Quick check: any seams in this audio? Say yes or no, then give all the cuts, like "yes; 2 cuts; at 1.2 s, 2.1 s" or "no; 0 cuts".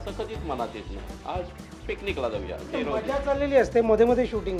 no; 0 cuts